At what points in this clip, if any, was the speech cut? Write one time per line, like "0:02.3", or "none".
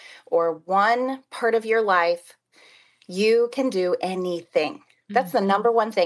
none